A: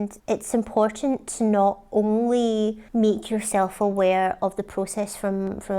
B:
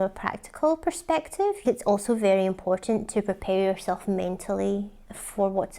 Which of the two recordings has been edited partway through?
B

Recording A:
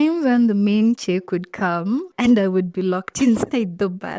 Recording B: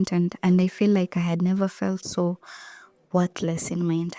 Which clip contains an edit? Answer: A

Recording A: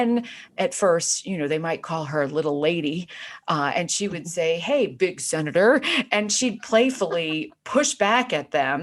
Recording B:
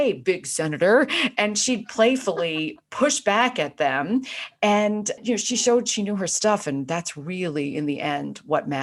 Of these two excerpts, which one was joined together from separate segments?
B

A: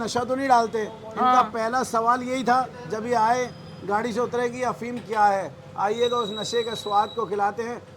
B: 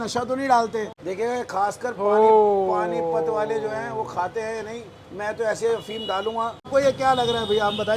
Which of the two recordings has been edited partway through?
B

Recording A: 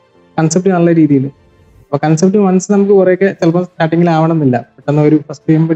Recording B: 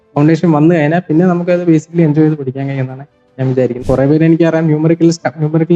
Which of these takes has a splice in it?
B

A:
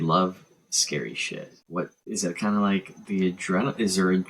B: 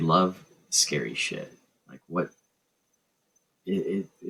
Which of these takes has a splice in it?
A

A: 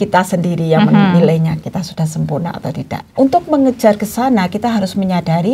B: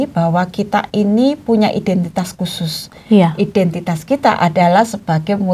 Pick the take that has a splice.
A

